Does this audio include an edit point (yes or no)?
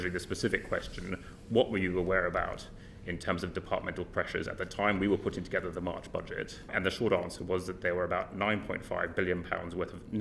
yes